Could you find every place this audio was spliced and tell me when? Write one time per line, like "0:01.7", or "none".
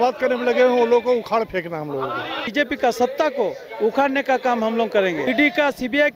0:02.4
0:05.3